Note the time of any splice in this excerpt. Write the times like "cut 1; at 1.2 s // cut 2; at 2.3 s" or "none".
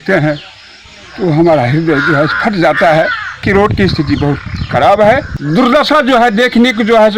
cut 1; at 3.4 s // cut 2; at 5.3 s